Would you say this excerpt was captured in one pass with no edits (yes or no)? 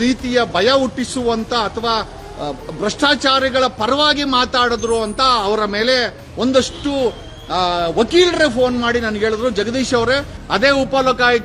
no